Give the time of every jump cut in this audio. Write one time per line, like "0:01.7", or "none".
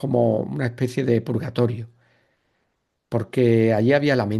none